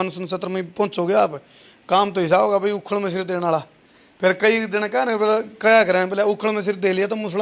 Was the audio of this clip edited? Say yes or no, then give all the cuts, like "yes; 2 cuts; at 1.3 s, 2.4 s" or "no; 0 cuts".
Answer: no; 0 cuts